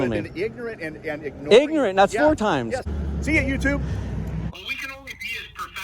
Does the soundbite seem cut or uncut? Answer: cut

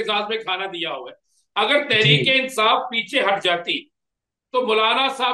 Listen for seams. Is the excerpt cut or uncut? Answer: uncut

